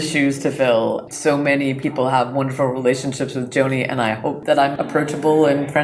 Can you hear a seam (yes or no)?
yes